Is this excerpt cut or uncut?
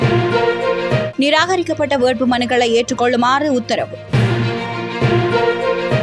cut